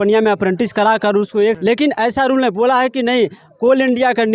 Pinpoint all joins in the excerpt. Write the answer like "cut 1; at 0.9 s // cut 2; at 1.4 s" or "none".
cut 1; at 1.6 s

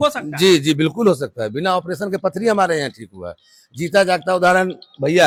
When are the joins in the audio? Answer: none

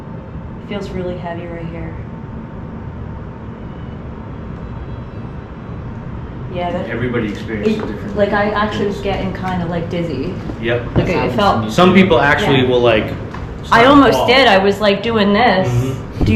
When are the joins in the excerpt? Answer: none

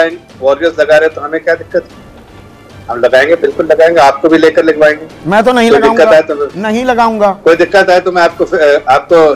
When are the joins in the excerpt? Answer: none

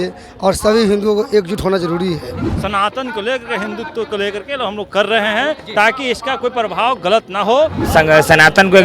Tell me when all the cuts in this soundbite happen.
cut 1; at 2.5 s // cut 2; at 7.8 s

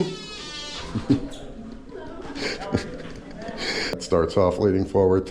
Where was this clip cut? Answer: cut 1; at 3.9 s

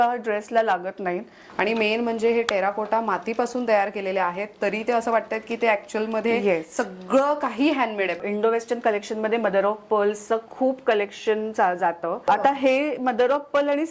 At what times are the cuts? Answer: cut 1; at 1.4 s // cut 2; at 8.2 s // cut 3; at 12.3 s

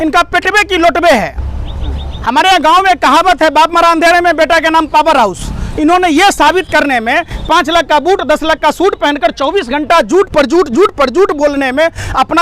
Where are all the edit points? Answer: none

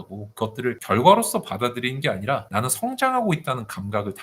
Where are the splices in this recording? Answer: cut 1; at 0.8 s // cut 2; at 2.5 s

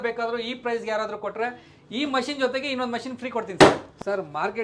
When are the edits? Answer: none

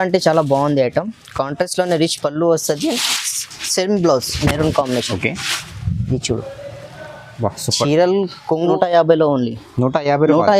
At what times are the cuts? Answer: cut 1; at 8.7 s

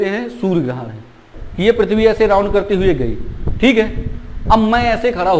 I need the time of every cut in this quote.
cut 1; at 1.4 s

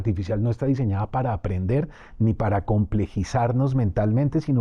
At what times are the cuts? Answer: none

